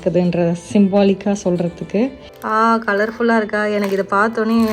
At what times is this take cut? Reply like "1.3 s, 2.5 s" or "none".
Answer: 2.3 s